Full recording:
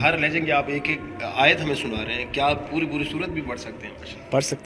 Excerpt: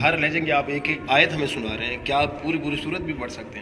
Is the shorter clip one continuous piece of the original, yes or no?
no